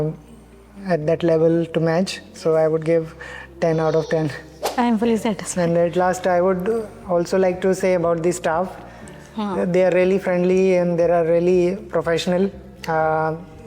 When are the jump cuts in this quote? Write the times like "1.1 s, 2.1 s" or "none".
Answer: 4.6 s